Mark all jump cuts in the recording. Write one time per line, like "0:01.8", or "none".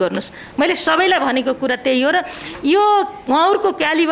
none